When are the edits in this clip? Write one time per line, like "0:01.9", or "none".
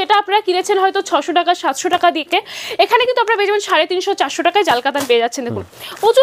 none